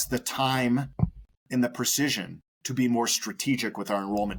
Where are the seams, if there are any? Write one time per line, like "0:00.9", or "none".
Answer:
none